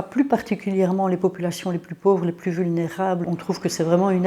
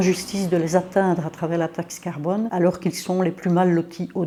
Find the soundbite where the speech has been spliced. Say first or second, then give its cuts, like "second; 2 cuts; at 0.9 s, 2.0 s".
first; 1 cut; at 3.3 s